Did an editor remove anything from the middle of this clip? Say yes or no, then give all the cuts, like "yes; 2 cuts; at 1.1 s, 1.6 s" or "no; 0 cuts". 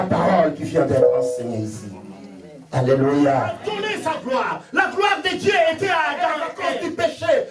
yes; 2 cuts; at 3.7 s, 6.5 s